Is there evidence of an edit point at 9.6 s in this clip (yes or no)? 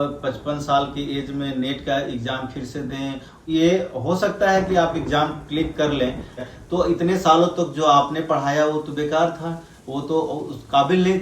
no